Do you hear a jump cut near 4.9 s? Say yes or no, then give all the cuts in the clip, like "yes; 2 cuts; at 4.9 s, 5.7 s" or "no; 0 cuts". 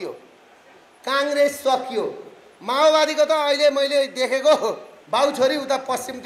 yes; 1 cut; at 4.9 s